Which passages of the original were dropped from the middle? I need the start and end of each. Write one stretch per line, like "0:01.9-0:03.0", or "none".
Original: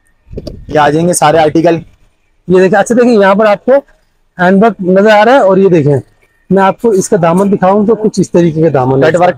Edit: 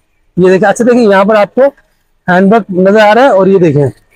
none